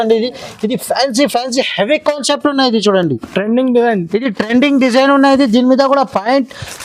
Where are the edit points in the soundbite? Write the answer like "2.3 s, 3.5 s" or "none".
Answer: none